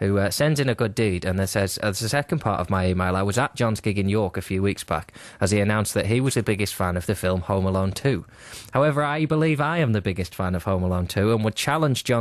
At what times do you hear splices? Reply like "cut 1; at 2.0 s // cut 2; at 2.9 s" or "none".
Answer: cut 1; at 7.2 s